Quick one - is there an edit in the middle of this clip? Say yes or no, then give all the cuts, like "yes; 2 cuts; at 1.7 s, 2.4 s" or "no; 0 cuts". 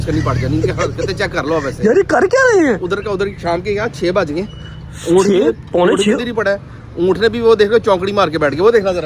no; 0 cuts